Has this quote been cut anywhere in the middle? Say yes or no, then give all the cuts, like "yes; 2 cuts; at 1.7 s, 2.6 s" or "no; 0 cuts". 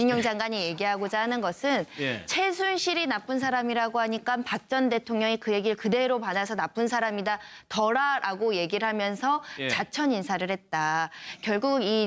yes; 1 cut; at 5.8 s